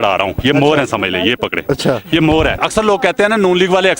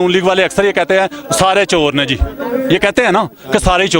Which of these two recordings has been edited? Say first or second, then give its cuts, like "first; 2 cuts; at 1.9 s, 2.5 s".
first; 1 cut; at 2.6 s